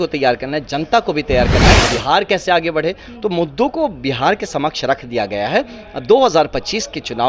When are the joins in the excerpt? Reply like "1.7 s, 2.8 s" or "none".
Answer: 1.9 s